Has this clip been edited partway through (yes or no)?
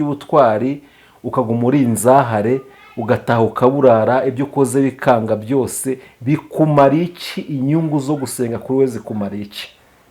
no